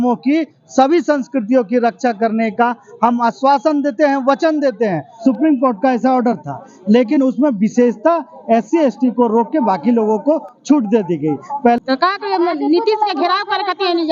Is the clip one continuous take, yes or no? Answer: no